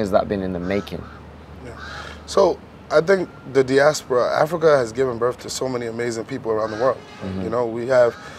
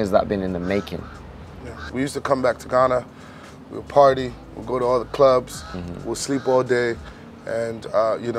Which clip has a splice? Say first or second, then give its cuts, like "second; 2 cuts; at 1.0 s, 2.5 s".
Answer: second; 1 cut; at 1.8 s